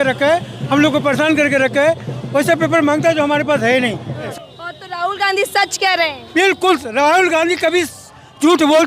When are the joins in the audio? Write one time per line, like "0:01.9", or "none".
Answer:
0:04.3

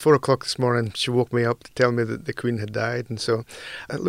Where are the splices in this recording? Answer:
none

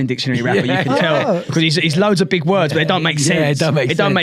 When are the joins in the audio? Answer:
none

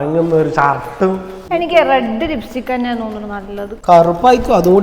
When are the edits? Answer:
0:03.7

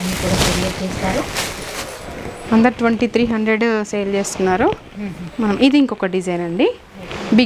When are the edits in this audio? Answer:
0:02.4

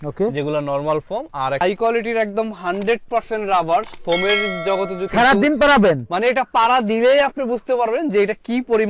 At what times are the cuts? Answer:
0:01.6
0:05.1

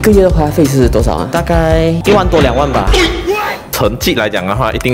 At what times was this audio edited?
0:01.3
0:03.6

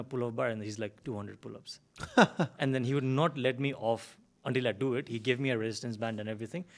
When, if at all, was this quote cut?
none

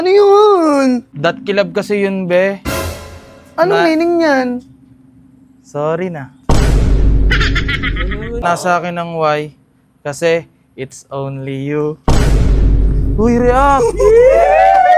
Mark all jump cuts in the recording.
0:01.1
0:08.4

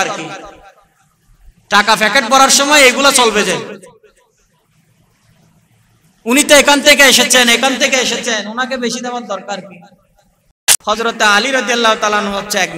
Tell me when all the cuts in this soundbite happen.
0:10.6

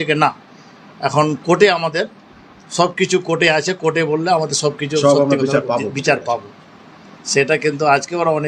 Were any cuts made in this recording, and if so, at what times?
none

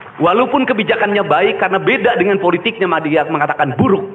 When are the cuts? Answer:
none

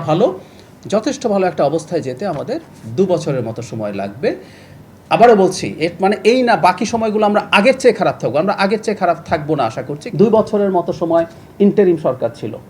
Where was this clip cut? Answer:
0:10.0

